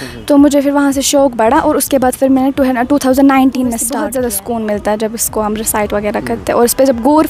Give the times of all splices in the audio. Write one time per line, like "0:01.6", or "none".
0:03.9